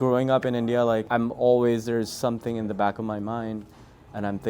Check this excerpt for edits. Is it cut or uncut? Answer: cut